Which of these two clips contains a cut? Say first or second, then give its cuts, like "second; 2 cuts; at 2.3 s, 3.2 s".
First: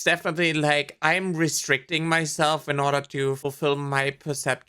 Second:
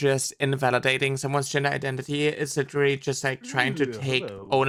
first; 1 cut; at 3.4 s